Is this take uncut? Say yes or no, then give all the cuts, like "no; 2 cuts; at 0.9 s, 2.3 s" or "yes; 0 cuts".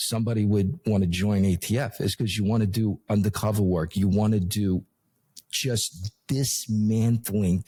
yes; 0 cuts